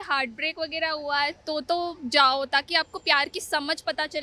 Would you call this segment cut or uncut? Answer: uncut